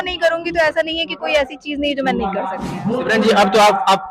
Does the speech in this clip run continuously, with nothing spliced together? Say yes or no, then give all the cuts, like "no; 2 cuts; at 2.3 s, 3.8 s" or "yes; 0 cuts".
no; 1 cut; at 2.7 s